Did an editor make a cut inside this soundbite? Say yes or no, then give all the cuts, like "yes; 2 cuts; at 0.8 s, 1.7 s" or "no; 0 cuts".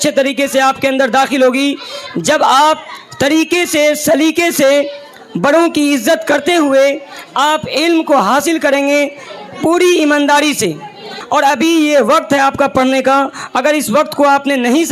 yes; 1 cut; at 11.2 s